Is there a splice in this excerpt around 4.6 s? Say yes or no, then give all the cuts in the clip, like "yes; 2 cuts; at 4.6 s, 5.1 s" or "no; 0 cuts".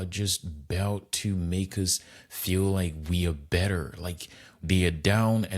yes; 1 cut; at 4.6 s